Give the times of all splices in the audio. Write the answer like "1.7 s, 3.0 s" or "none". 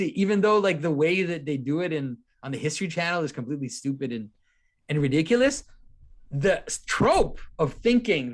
none